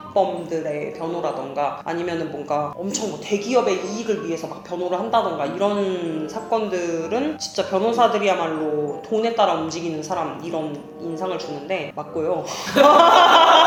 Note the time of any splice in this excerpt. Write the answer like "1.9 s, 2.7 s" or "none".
none